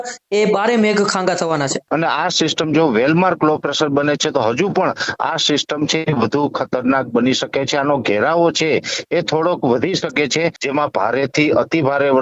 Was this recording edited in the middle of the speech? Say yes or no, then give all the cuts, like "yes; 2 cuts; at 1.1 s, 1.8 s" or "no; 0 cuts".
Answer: yes; 2 cuts; at 1.8 s, 10.6 s